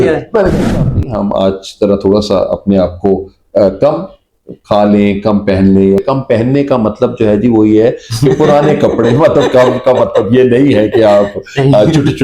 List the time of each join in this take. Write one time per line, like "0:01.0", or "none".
0:00.7
0:06.0